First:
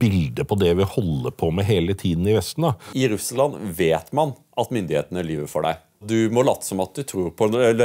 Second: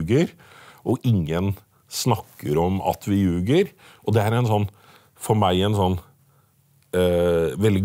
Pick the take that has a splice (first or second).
first